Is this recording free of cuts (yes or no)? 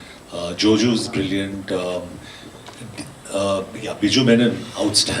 yes